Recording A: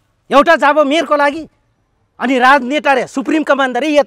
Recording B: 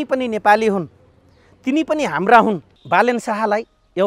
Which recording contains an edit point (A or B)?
B